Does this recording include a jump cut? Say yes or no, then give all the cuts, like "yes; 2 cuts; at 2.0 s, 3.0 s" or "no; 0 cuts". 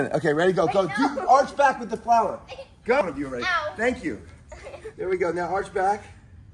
yes; 1 cut; at 3.0 s